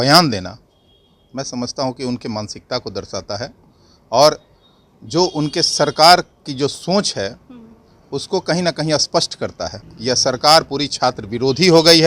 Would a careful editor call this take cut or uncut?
cut